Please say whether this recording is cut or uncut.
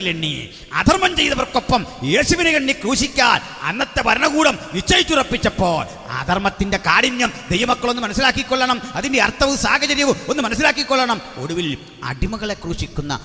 uncut